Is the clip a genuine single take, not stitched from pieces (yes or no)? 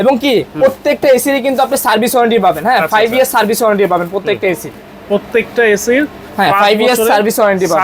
yes